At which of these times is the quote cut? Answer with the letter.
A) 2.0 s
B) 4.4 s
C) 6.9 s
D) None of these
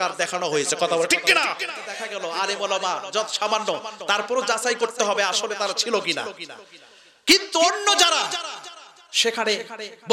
A